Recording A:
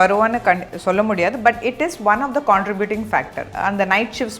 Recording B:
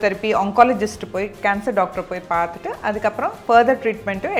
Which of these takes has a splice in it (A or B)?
A